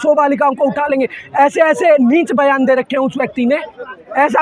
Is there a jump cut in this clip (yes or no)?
no